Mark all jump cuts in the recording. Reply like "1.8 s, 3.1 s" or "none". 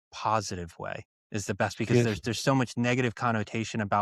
1.1 s

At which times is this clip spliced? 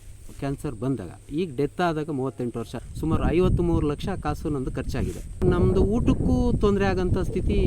2.7 s, 5.4 s

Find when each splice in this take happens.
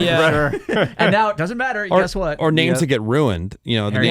none

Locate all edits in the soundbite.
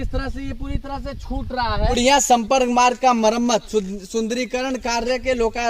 2.0 s

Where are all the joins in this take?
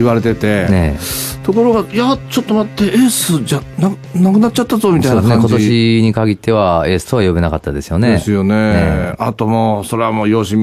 6.0 s

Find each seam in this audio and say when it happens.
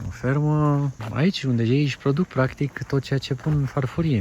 1.0 s

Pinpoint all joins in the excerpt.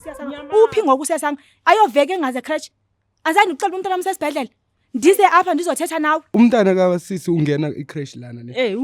6.3 s

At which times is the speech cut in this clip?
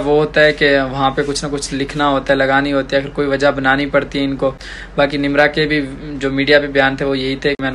none

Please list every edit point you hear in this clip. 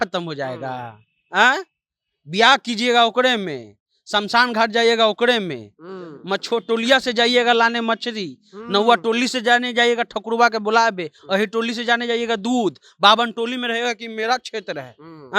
none

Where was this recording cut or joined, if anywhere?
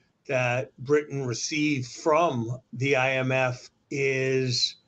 2.5 s, 3.7 s

